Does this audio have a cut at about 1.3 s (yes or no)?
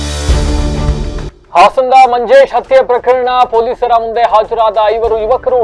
yes